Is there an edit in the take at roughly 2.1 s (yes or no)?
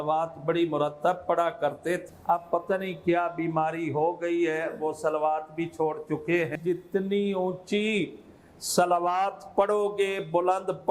yes